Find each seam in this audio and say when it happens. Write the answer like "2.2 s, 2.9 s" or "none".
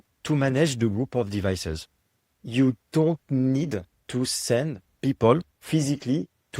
4.0 s, 4.8 s, 5.5 s